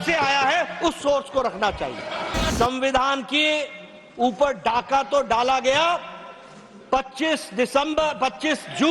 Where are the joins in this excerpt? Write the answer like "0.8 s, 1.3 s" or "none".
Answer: 2.5 s

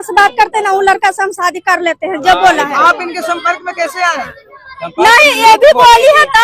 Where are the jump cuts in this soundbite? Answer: none

